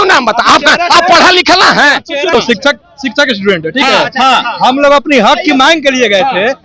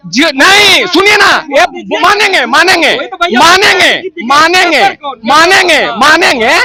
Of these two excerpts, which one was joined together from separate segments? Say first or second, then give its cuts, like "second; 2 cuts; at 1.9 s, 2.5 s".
first; 1 cut; at 2.3 s